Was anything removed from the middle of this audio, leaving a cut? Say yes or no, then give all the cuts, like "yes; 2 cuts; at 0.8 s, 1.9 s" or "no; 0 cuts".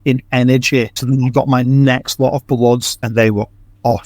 yes; 2 cuts; at 1.0 s, 3.1 s